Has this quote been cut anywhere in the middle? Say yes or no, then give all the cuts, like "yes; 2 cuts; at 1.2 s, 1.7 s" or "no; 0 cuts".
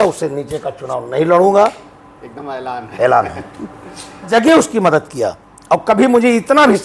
yes; 1 cut; at 4.3 s